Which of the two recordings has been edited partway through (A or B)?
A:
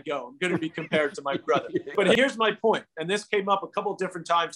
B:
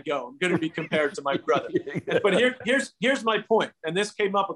A